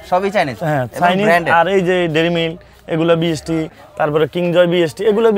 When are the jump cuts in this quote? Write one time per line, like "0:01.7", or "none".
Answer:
0:03.8

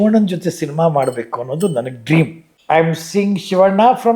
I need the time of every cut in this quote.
0:02.5

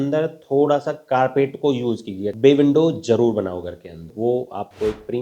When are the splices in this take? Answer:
0:02.3
0:04.1

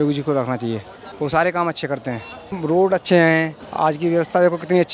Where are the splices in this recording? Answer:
0:01.0
0:02.6
0:03.6

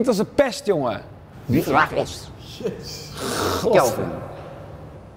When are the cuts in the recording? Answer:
none

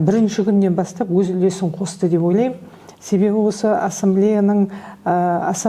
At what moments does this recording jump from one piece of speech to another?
none

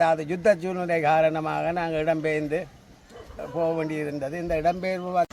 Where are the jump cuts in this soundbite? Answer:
none

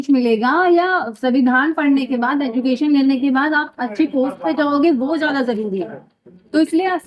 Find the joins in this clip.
none

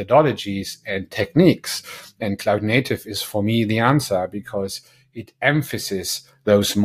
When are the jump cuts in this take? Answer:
none

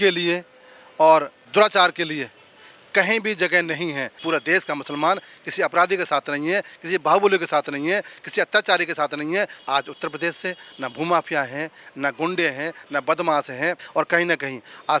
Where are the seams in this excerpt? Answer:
0:01.4
0:04.1
0:09.5
0:13.8

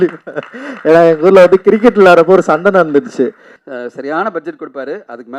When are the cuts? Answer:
0:03.5

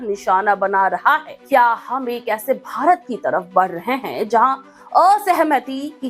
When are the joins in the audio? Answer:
0:01.3

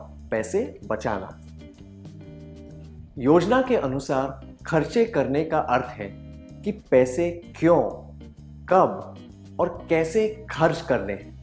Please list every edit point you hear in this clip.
none

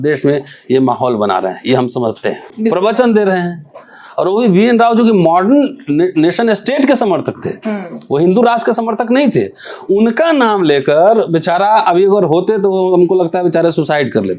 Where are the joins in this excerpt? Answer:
0:02.5

